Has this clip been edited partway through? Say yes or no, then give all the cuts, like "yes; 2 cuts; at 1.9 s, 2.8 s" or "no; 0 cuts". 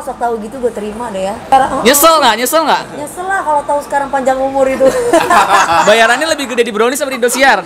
yes; 1 cut; at 1.5 s